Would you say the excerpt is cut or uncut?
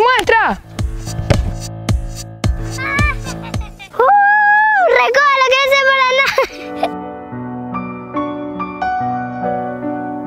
uncut